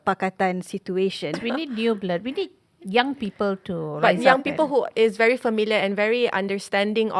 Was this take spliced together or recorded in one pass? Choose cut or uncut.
cut